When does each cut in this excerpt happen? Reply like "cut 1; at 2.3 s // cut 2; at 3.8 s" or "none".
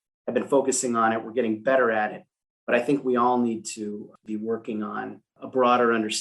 cut 1; at 4.2 s // cut 2; at 5.3 s